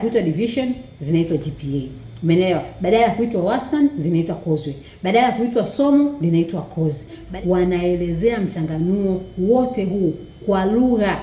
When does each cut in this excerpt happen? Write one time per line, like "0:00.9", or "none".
0:07.3